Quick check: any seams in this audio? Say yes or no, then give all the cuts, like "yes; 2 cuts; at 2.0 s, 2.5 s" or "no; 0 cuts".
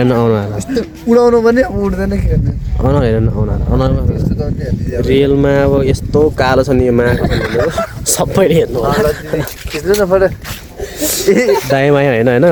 no; 0 cuts